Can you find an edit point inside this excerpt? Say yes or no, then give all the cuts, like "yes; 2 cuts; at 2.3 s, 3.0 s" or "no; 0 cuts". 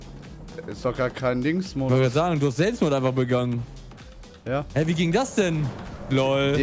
no; 0 cuts